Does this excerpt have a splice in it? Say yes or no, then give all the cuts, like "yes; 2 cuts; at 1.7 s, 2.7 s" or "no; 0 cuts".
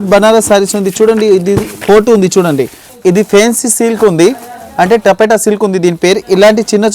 yes; 1 cut; at 2.8 s